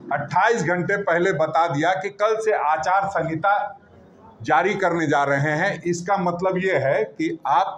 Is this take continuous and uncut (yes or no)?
yes